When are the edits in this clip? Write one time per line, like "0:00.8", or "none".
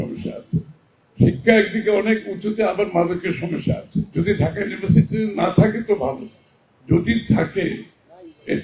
0:04.1

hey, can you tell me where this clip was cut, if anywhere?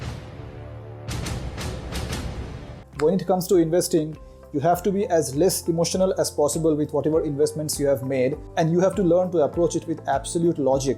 none

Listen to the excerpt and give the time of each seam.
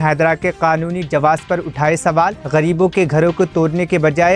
none

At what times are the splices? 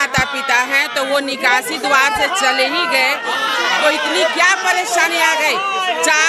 none

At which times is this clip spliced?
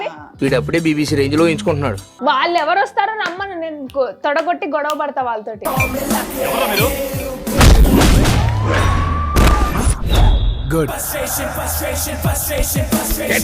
0:02.1

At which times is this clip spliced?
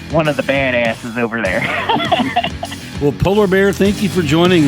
none

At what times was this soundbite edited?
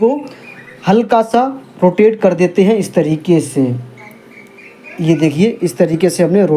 none

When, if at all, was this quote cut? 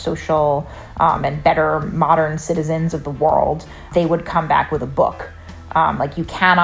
0:03.9

